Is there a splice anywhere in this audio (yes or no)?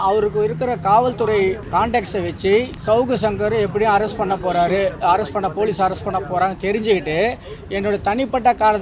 yes